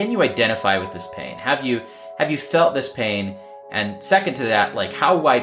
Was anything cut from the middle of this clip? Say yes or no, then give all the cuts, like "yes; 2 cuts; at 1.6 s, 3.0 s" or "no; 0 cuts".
no; 0 cuts